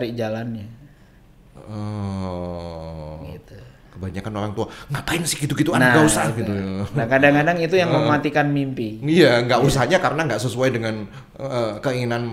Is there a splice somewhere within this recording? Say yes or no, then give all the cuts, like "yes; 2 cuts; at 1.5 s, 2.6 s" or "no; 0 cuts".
no; 0 cuts